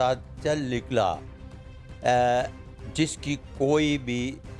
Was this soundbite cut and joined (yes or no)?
no